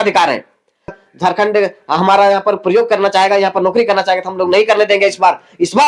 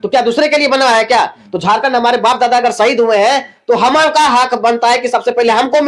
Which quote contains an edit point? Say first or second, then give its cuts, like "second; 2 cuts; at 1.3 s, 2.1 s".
first; 1 cut; at 1.0 s